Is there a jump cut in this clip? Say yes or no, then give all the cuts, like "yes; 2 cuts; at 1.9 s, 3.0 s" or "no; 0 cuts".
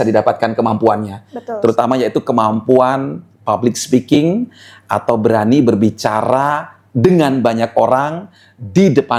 no; 0 cuts